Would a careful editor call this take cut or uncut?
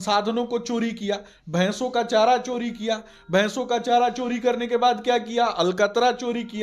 uncut